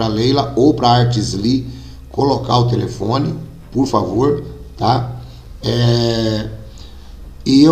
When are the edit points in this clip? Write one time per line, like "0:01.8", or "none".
none